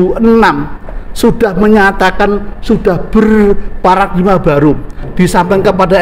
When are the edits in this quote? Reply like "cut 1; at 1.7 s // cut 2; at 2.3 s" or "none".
none